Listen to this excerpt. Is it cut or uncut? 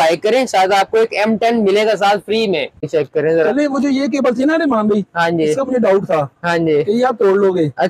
cut